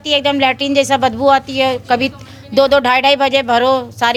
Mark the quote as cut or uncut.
uncut